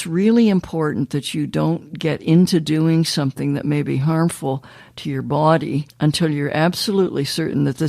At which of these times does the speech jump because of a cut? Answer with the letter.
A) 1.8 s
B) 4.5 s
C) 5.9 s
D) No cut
C